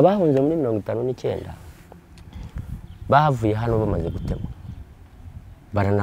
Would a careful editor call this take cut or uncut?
uncut